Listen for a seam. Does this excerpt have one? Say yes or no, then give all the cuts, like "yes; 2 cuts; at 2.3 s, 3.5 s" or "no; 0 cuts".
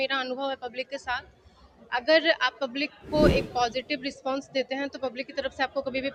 no; 0 cuts